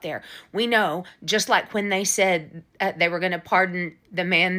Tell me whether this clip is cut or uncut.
uncut